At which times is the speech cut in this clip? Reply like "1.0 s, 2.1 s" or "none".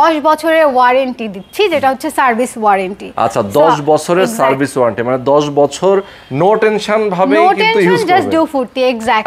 none